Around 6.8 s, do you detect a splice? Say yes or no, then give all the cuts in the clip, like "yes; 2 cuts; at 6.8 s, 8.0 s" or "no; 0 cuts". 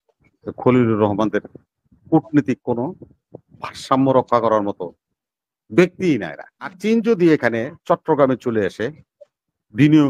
yes; 1 cut; at 6.8 s